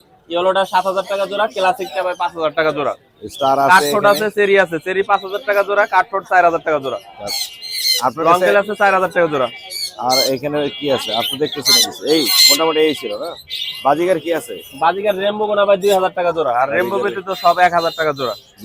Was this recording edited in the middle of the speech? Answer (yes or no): no